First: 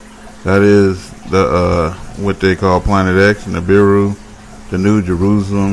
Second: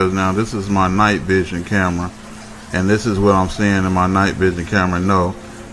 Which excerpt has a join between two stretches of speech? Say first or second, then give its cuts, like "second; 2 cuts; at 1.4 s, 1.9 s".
second; 1 cut; at 2.9 s